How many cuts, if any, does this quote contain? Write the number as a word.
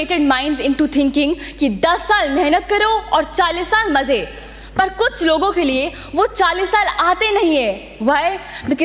zero